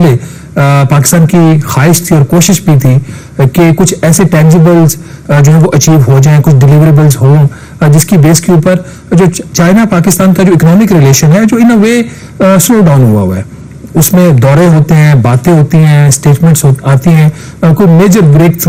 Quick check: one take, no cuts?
yes; 0 cuts

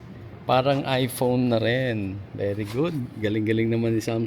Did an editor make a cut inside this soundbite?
no; 0 cuts

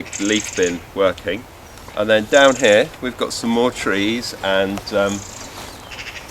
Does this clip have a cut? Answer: no; 0 cuts

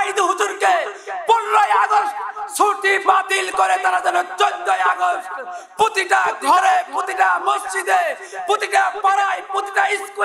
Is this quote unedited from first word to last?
yes; 0 cuts

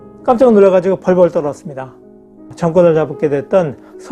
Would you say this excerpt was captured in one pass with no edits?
no; 1 cut; at 2.4 s

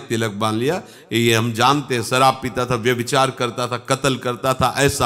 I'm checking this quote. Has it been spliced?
no; 0 cuts

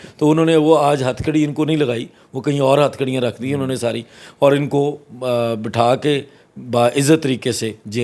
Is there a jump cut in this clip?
no; 0 cuts

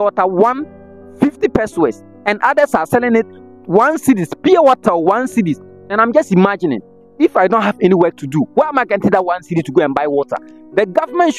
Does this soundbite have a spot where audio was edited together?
no; 0 cuts

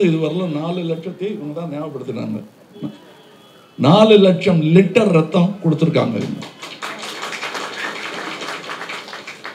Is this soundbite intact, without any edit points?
yes; 0 cuts

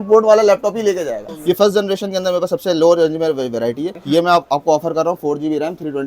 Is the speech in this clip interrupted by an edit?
yes; 2 cuts; at 1.3 s, 3.9 s

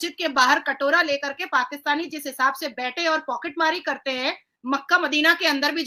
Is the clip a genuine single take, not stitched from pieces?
yes; 0 cuts

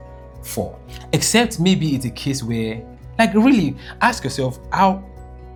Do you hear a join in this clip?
no; 0 cuts

